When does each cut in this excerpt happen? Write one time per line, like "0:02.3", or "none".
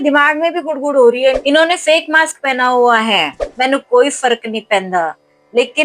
0:01.4
0:03.4